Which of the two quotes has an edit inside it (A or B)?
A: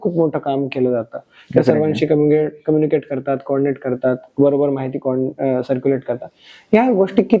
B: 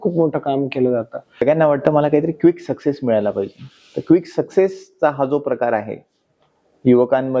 B